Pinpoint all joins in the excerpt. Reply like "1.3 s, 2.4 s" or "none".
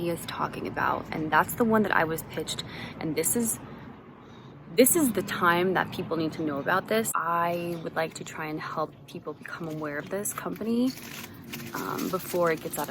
7.1 s

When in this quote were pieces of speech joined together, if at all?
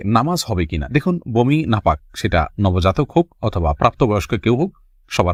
none

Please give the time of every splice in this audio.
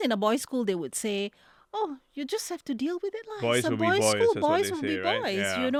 none

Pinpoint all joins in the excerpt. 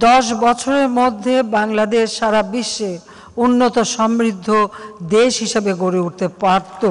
none

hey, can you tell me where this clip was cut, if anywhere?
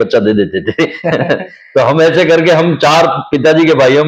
none

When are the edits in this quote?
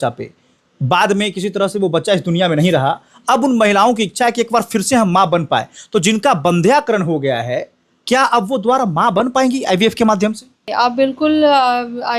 10.7 s

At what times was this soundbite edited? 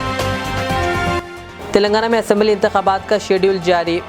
1.1 s

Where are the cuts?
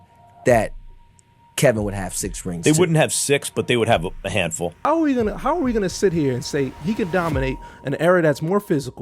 4.8 s

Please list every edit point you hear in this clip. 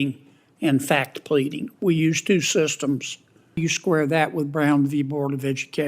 3.6 s

